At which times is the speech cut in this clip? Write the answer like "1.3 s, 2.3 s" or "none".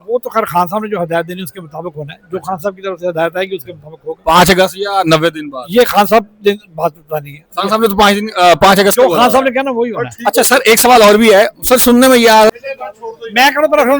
12.5 s